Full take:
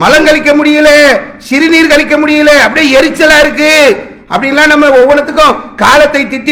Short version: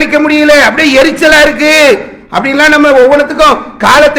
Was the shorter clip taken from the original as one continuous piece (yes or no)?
yes